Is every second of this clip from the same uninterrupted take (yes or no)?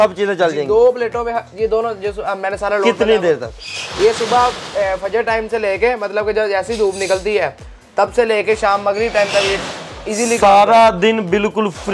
yes